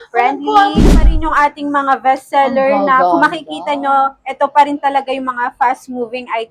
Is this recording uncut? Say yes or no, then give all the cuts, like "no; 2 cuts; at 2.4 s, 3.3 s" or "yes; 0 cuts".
no; 1 cut; at 0.9 s